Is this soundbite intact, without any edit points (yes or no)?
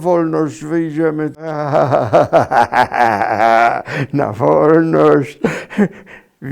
no